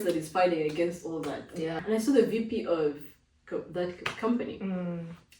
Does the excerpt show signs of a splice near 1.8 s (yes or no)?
yes